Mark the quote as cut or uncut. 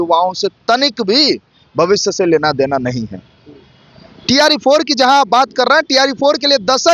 uncut